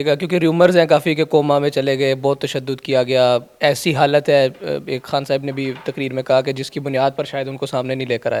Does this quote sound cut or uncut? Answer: uncut